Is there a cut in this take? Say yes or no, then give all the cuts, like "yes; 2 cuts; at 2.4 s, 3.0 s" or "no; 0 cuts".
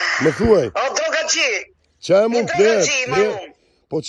no; 0 cuts